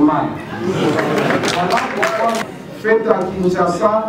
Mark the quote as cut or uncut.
cut